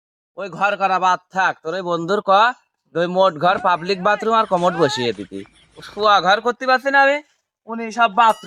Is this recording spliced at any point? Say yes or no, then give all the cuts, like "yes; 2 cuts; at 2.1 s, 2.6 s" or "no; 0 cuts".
no; 0 cuts